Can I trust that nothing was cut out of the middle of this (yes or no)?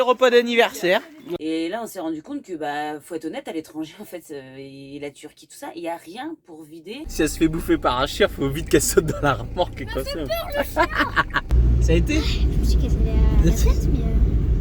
no